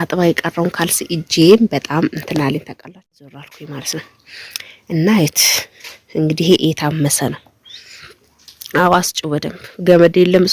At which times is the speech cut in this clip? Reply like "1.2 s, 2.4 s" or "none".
3.5 s

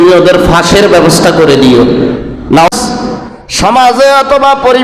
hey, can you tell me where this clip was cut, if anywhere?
2.7 s

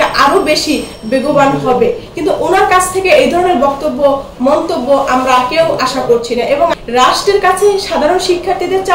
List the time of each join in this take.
2.1 s, 6.7 s

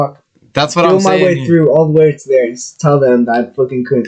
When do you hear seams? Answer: none

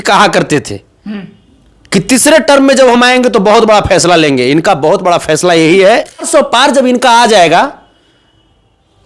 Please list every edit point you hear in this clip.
6.3 s

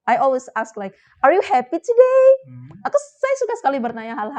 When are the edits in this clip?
none

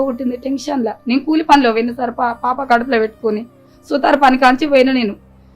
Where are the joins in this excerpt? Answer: none

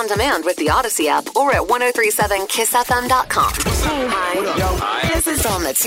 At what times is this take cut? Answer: 3.6 s

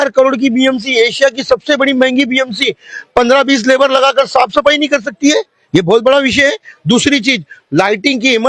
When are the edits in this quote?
none

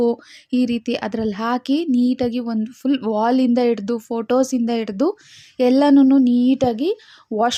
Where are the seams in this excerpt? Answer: none

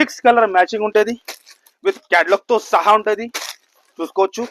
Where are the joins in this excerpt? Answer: none

